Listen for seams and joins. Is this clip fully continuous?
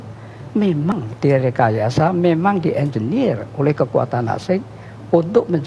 no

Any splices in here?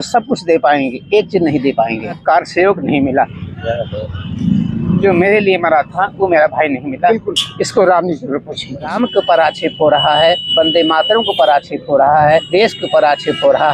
yes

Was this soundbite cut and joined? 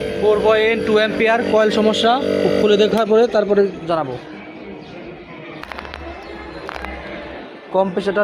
no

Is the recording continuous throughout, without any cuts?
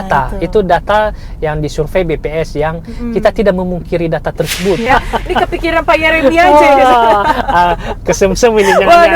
no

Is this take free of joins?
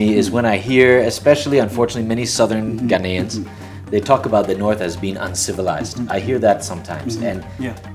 yes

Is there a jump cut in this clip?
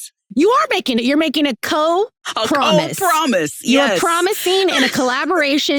no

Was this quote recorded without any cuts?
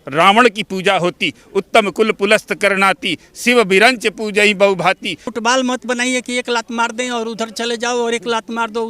no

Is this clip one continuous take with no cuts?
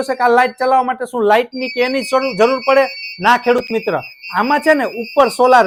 yes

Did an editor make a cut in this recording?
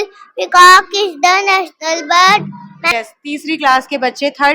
yes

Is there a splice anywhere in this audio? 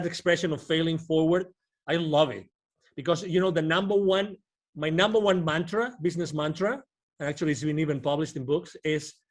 no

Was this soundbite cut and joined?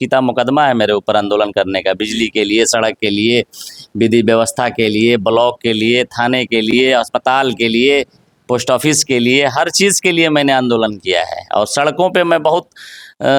no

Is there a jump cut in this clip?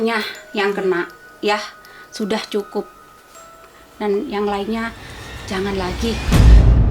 no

